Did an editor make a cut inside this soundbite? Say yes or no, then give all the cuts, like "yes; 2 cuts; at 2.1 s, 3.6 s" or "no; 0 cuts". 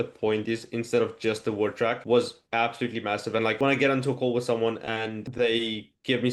yes; 3 cuts; at 2.0 s, 3.6 s, 5.2 s